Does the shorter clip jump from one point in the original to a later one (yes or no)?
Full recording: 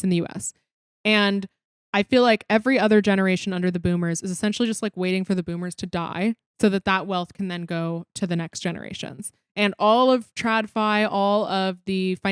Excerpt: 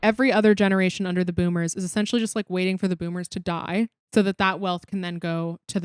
no